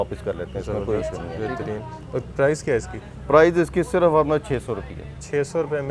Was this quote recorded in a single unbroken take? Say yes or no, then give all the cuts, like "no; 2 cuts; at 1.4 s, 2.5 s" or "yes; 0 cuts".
yes; 0 cuts